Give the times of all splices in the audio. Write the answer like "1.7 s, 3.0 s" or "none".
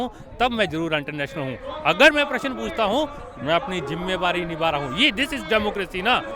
none